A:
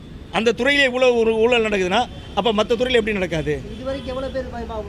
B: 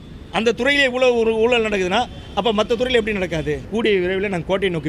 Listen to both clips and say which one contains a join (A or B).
B